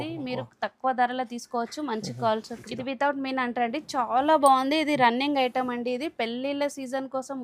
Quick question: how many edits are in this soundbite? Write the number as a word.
one